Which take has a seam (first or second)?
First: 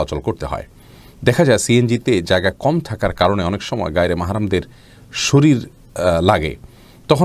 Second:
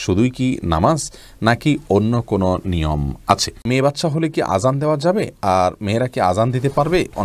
second